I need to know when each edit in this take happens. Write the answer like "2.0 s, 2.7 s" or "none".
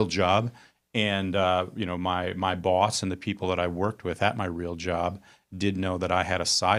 none